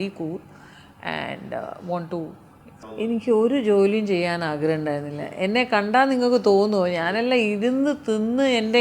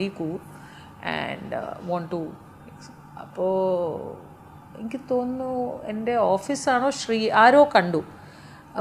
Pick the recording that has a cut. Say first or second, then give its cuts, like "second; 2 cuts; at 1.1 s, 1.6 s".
first; 1 cut; at 3.0 s